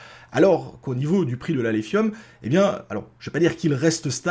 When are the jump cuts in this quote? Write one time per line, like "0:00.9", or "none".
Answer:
none